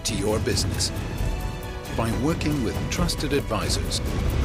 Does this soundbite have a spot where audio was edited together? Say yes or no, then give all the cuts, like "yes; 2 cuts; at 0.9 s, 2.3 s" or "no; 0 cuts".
no; 0 cuts